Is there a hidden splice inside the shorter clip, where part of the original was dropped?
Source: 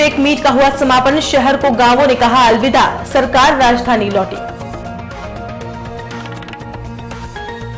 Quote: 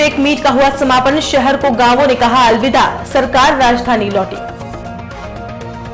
no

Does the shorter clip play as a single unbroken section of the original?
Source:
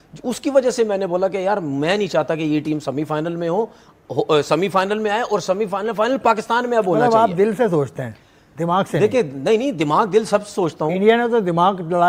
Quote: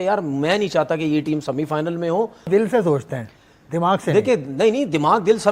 no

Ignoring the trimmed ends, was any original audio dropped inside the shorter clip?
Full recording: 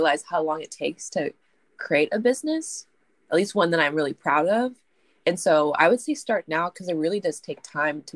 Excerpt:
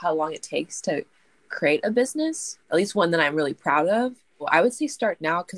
yes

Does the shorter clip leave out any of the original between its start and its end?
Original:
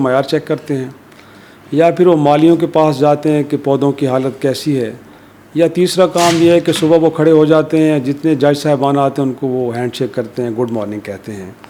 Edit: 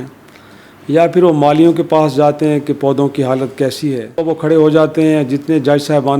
yes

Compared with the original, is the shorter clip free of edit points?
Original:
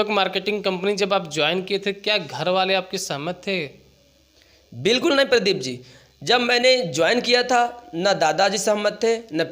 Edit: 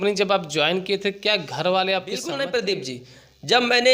no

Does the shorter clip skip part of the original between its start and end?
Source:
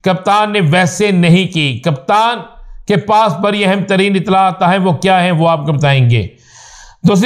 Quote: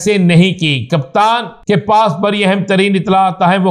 yes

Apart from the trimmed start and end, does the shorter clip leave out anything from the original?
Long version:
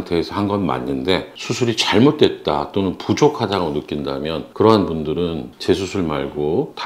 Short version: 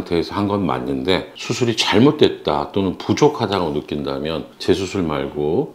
yes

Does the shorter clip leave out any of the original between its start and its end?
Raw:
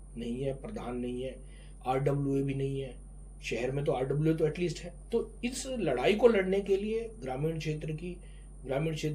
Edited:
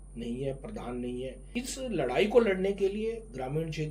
yes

